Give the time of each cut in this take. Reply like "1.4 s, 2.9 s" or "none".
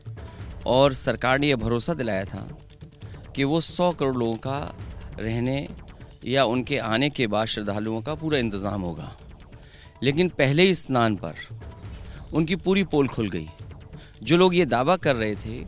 none